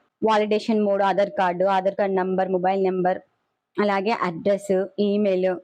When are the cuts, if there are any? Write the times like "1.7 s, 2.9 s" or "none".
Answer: none